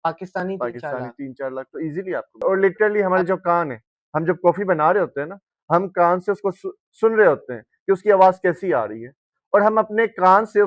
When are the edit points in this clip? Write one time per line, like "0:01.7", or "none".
0:02.4